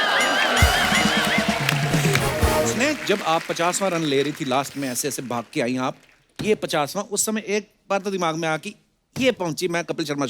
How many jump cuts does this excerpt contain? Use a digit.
1